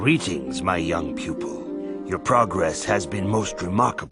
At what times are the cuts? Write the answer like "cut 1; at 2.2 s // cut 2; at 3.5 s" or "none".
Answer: cut 1; at 1.0 s // cut 2; at 2.1 s